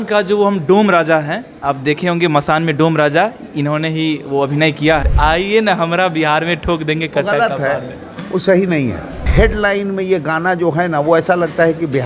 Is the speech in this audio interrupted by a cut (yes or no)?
yes